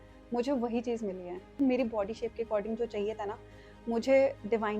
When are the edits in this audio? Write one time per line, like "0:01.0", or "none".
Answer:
0:01.6